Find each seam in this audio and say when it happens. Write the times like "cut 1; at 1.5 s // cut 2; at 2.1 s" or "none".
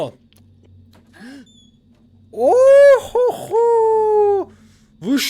none